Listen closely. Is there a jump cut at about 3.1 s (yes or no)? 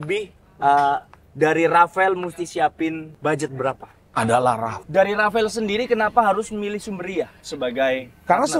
yes